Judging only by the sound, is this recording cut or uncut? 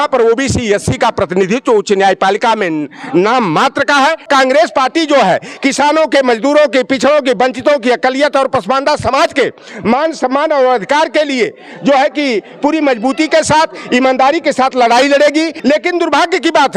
cut